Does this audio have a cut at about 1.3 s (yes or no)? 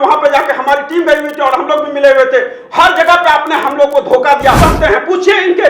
no